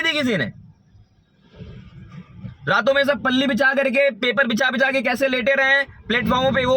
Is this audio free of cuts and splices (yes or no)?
yes